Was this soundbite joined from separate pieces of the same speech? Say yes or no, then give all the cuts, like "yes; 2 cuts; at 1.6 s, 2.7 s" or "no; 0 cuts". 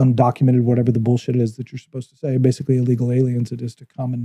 no; 0 cuts